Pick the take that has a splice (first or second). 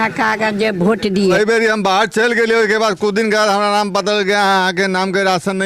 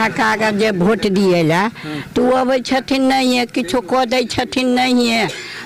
first